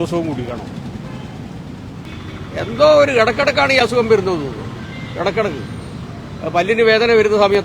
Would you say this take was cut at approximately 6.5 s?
no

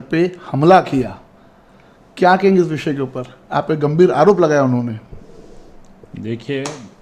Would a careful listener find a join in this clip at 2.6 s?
no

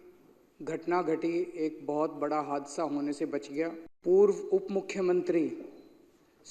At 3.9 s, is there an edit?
yes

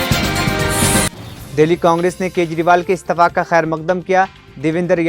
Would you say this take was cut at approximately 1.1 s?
yes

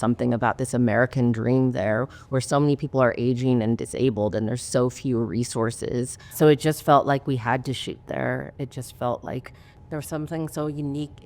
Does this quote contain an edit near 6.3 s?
yes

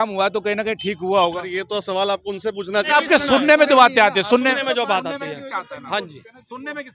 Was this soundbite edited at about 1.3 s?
no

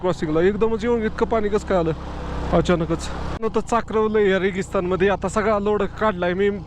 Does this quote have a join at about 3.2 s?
yes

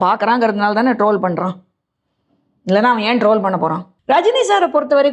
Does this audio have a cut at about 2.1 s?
no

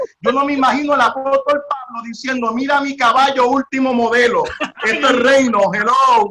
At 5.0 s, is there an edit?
no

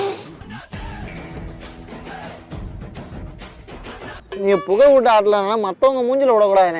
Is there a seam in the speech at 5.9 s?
no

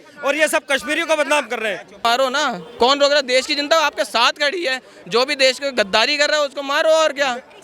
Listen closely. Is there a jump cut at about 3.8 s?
no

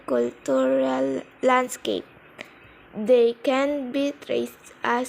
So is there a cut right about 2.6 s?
yes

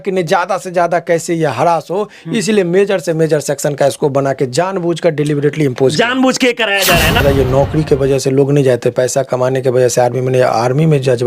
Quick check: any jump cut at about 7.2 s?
yes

